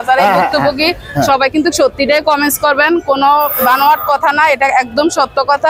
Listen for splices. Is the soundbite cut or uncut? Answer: uncut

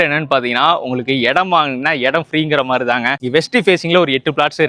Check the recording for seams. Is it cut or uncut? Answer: uncut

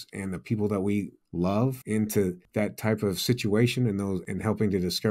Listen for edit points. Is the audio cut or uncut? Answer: cut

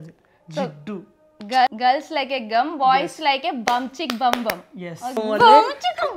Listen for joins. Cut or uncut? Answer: cut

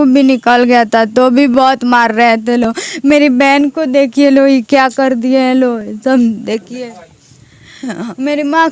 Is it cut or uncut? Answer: uncut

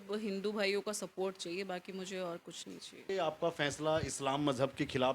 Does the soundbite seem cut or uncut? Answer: cut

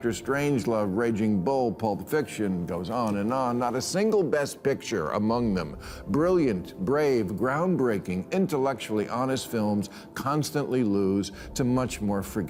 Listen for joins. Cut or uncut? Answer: uncut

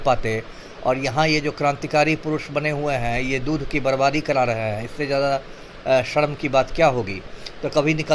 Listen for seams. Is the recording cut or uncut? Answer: uncut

